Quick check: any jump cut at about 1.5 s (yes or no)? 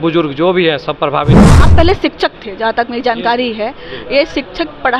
yes